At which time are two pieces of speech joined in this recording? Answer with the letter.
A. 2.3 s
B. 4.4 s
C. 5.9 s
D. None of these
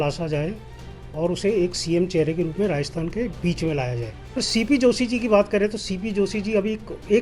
B